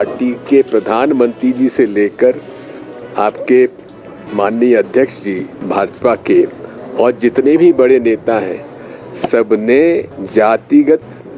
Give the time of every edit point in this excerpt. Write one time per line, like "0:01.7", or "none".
0:05.5
0:10.2